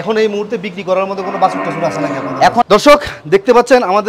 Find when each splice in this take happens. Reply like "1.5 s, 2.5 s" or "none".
2.6 s